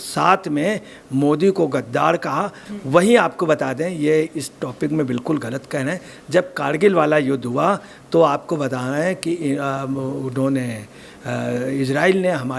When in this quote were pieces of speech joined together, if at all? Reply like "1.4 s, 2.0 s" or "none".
2.6 s